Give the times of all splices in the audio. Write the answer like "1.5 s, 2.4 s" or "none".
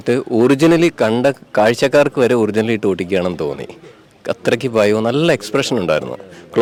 none